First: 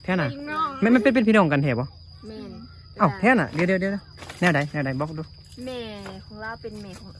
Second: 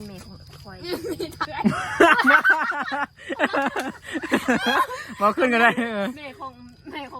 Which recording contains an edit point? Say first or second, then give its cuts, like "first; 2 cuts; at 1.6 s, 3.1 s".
second; 1 cut; at 1.5 s